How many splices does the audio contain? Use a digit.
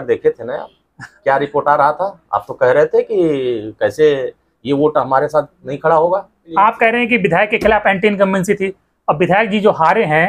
1